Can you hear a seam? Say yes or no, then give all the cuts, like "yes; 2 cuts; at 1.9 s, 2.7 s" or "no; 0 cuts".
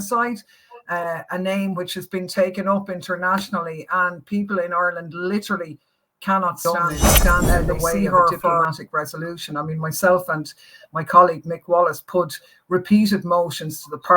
yes; 1 cut; at 8.6 s